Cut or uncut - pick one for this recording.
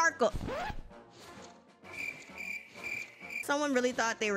cut